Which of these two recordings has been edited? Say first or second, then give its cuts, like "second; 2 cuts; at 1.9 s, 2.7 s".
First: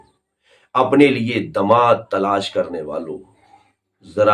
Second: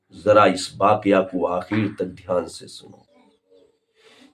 second; 1 cut; at 3.1 s